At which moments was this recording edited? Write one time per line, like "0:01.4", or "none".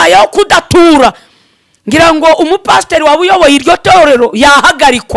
none